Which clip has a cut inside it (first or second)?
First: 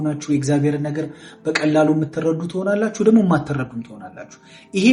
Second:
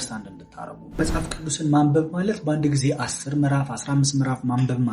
second